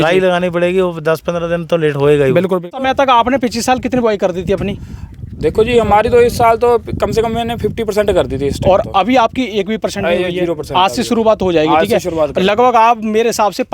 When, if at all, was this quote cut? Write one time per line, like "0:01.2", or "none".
0:02.7